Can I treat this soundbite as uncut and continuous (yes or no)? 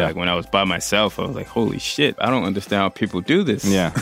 no